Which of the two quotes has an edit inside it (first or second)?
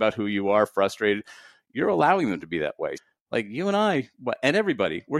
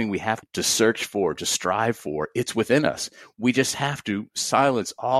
first